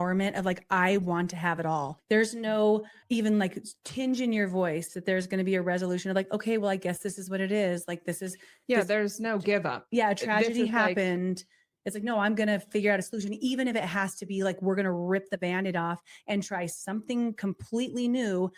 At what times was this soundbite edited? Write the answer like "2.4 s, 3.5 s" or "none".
1.9 s, 2.9 s